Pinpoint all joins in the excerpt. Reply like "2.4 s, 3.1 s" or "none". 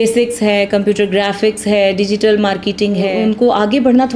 3.1 s

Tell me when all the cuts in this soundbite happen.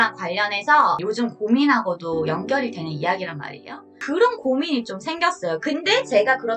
3.9 s

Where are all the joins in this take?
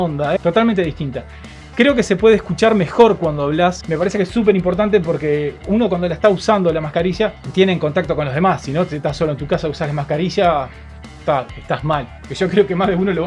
none

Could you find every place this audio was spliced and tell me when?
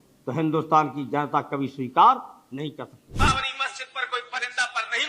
3.0 s

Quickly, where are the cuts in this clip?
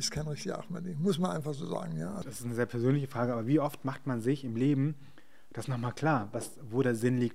2.2 s

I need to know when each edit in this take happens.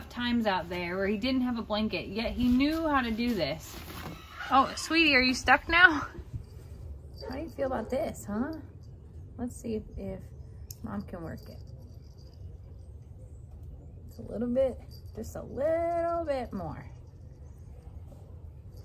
6.3 s

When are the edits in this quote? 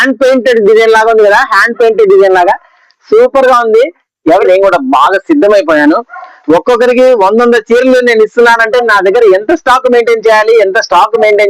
4.4 s

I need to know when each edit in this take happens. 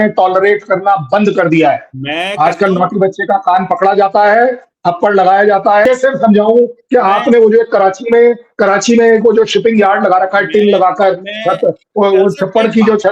5.8 s

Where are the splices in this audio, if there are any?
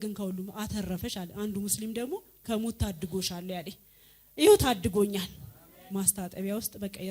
5.8 s

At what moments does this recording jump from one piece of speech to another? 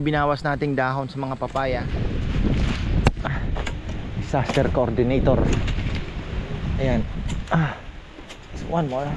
1.9 s

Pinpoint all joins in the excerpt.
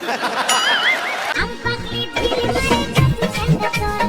1.3 s

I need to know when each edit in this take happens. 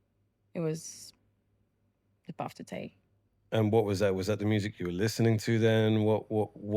none

